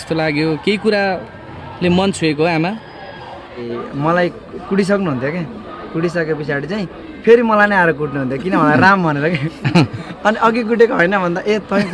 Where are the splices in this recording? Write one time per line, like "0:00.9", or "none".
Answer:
0:03.7